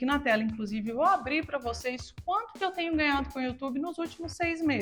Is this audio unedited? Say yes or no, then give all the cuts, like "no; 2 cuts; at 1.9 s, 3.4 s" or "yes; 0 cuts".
yes; 0 cuts